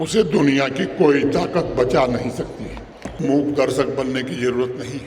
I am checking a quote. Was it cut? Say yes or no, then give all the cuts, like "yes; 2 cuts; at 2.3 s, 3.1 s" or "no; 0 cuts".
yes; 1 cut; at 3.2 s